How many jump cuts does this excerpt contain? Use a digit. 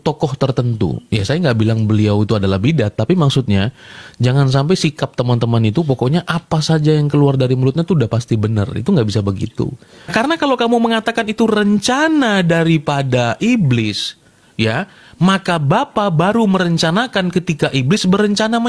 1